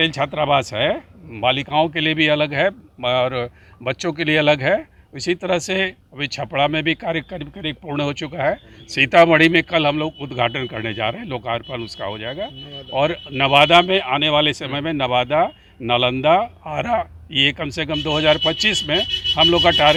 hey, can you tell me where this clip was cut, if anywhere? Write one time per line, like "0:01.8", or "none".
none